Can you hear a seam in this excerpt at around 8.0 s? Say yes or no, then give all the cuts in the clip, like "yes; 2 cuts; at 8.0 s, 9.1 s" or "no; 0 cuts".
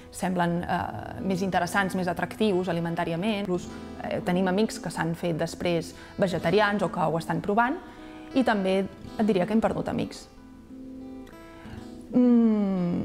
no; 1 cut; at 3.4 s